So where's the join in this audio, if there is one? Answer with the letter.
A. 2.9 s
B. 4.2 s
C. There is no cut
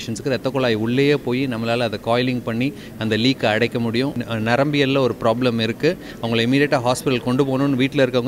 B